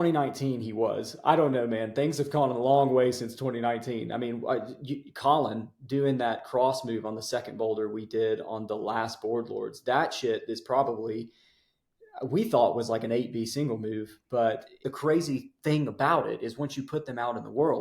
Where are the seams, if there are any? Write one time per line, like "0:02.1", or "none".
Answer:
0:14.9